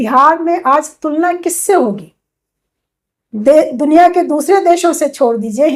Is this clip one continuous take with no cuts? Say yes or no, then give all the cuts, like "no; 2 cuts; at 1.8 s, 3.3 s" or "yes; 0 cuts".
yes; 0 cuts